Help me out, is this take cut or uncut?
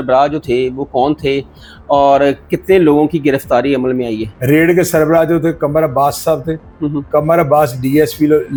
uncut